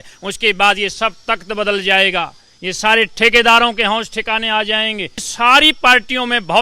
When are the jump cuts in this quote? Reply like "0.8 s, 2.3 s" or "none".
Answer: 5.3 s